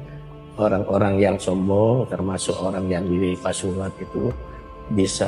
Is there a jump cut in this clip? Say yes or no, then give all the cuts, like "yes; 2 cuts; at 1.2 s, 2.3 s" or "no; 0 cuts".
no; 0 cuts